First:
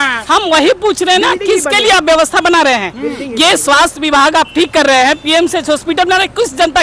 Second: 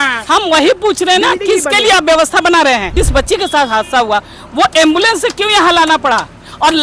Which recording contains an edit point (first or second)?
second